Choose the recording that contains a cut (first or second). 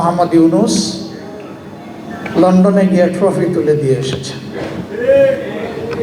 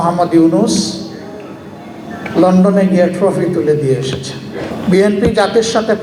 second